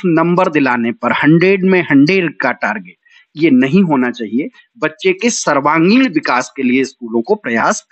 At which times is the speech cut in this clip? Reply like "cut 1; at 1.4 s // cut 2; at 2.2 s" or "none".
none